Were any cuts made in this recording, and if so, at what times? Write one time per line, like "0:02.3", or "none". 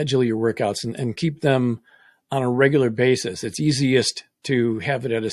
none